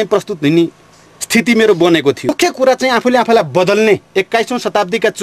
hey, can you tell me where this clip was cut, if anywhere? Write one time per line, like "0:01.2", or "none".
0:02.3